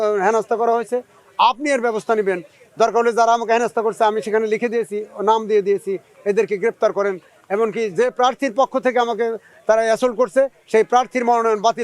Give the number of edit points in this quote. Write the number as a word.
zero